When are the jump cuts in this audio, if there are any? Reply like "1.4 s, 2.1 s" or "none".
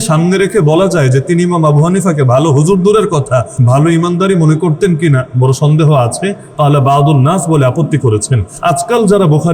3.5 s, 8.5 s